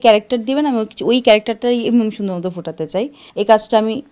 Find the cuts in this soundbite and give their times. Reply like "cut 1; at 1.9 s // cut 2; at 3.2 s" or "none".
cut 1; at 3.2 s